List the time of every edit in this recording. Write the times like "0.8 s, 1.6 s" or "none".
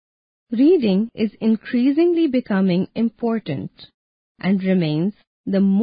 1.1 s